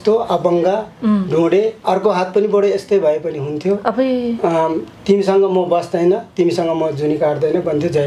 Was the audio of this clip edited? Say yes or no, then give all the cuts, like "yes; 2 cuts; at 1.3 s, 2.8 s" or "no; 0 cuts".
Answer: no; 0 cuts